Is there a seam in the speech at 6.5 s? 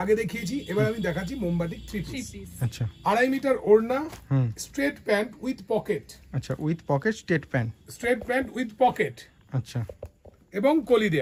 no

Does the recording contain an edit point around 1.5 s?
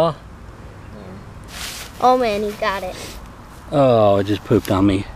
yes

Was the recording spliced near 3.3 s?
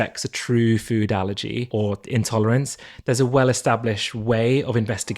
no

